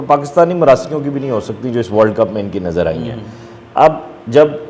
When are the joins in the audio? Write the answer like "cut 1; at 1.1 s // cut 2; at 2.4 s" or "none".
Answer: none